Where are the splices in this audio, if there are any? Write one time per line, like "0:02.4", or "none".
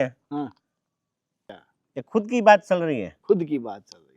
0:01.4